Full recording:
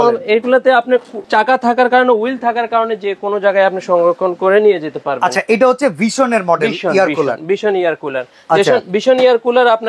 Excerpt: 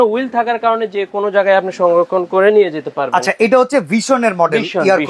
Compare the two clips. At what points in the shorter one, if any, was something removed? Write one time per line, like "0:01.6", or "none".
none